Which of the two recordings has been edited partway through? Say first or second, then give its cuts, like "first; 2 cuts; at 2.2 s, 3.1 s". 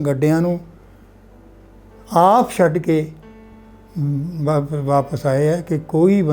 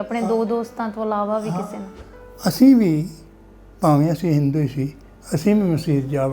second; 1 cut; at 2.0 s